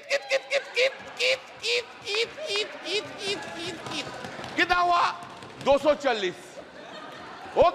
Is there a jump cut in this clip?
no; 0 cuts

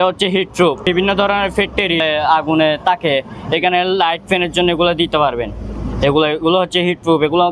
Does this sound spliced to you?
yes; 2 cuts; at 0.8 s, 2.0 s

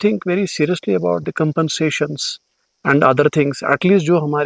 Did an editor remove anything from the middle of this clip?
no; 0 cuts

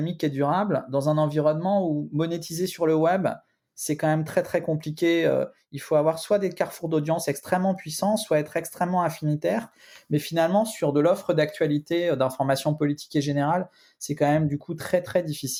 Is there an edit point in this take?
no; 0 cuts

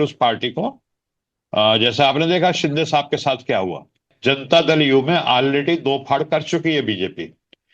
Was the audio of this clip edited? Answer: yes; 1 cut; at 4.1 s

